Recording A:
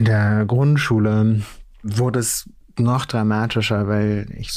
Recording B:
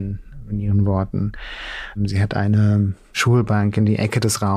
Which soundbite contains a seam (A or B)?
B